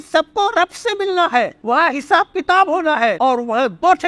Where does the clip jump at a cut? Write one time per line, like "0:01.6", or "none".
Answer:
0:01.6
0:03.2